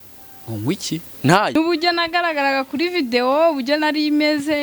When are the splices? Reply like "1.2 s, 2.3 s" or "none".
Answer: 1.6 s